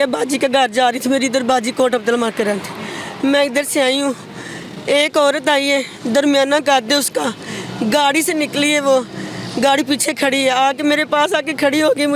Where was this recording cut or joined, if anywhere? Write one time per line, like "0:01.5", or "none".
none

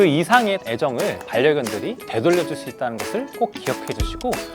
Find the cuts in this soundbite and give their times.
0:02.0

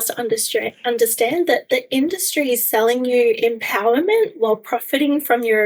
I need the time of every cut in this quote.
none

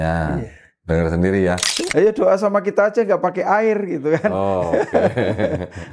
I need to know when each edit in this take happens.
0:01.7

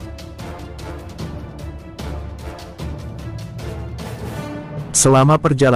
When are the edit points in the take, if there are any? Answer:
0:04.4

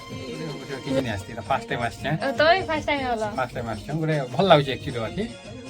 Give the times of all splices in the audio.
0:01.0

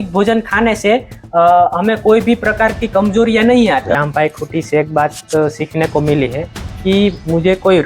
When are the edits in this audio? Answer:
0:04.0

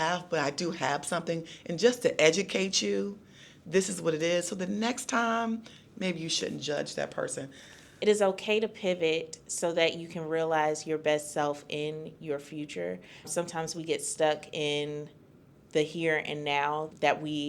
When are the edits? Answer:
0:07.9

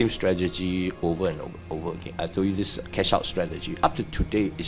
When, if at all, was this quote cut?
0:02.1

